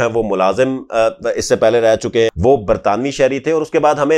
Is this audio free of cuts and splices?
no; 1 cut; at 2.3 s

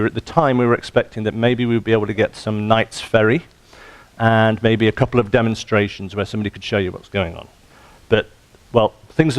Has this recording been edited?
yes; 1 cut; at 4.9 s

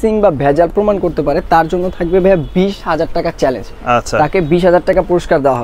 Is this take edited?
no; 0 cuts

